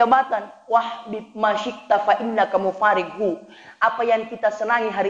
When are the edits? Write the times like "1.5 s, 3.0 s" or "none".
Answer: none